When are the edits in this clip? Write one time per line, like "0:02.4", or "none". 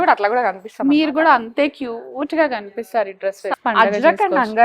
0:03.5